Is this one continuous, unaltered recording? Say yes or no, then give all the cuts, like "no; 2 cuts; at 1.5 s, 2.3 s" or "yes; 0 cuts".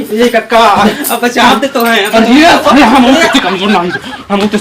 yes; 0 cuts